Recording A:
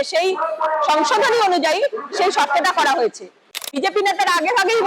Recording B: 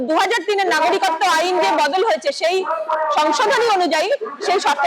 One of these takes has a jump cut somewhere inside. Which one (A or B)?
A